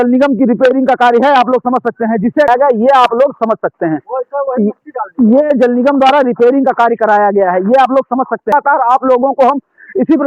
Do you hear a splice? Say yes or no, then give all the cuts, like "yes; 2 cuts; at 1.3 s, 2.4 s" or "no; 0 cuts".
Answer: yes; 2 cuts; at 2.5 s, 8.5 s